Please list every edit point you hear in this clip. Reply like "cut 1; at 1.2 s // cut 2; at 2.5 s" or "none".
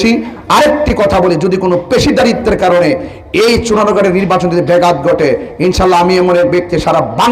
none